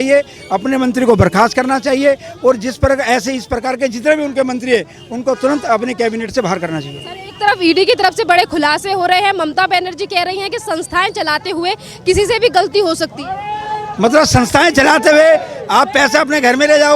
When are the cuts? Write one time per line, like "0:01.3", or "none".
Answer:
none